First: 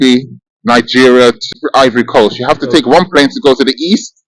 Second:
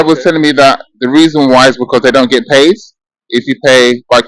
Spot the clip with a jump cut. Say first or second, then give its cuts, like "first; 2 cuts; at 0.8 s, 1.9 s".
first; 1 cut; at 1.4 s